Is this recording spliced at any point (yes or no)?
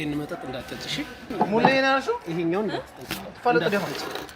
yes